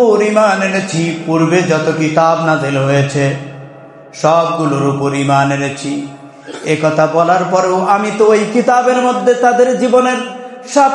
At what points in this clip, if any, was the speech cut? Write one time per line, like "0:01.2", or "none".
none